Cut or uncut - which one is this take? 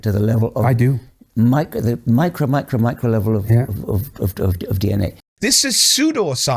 cut